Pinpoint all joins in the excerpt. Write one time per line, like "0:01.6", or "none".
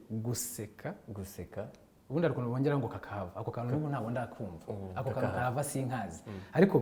none